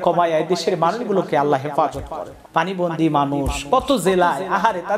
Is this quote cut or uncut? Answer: cut